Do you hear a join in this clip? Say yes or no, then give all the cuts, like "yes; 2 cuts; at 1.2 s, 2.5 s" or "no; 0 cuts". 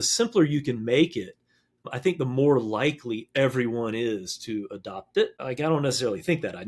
yes; 2 cuts; at 1.8 s, 5.4 s